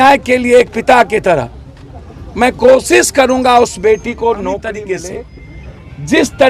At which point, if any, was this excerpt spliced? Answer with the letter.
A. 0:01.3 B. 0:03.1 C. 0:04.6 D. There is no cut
C